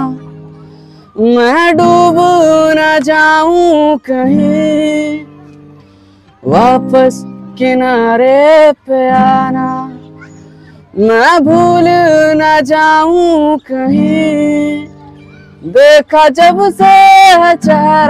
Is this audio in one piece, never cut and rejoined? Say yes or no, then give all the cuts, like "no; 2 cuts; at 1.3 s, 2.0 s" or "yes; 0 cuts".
yes; 0 cuts